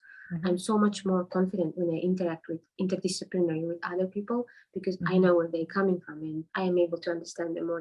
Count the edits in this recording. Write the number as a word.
one